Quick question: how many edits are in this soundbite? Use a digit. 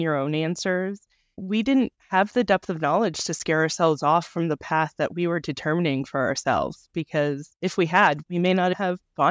2